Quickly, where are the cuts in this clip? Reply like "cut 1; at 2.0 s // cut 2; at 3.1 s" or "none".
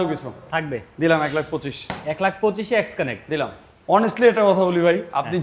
cut 1; at 3.7 s